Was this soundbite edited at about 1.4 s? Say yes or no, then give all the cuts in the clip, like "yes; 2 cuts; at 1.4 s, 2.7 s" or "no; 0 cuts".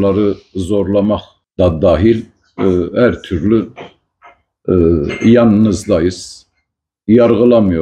yes; 1 cut; at 1.4 s